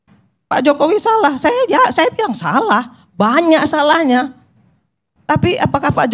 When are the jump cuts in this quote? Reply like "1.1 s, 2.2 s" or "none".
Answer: none